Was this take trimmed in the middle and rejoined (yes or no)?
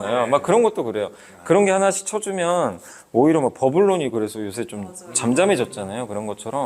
no